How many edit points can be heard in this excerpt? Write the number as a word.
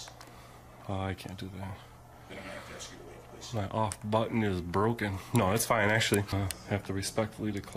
one